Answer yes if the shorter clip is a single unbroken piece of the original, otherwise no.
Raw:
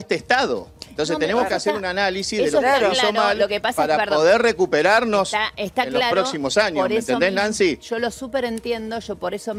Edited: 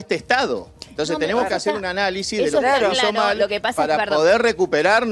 yes